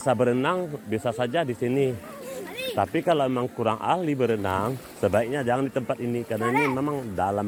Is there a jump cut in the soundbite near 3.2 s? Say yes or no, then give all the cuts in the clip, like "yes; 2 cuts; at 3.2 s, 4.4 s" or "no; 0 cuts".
no; 0 cuts